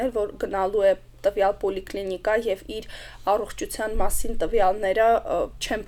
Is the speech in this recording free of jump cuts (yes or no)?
yes